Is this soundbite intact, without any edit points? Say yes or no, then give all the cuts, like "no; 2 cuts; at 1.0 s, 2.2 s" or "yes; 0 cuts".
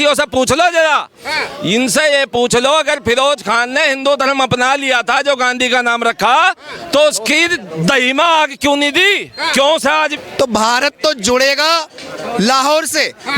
no; 1 cut; at 10.2 s